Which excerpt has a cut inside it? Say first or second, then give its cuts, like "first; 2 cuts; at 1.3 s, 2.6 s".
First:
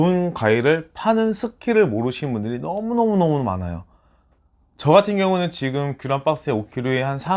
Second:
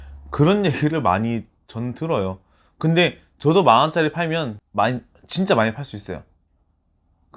second; 1 cut; at 4.6 s